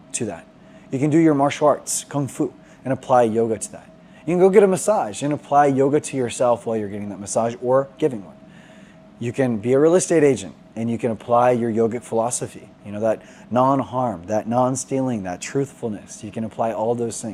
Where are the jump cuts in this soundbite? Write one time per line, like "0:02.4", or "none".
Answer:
none